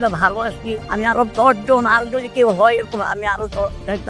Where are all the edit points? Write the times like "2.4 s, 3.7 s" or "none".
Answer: none